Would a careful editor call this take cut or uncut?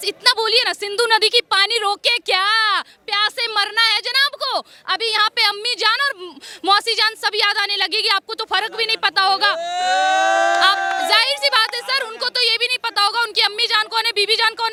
uncut